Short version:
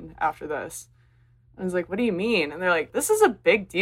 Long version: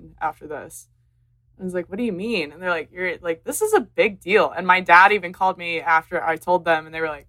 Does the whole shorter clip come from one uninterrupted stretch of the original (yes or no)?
no